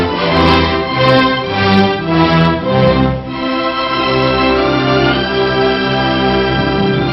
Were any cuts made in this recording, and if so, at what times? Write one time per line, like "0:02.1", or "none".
none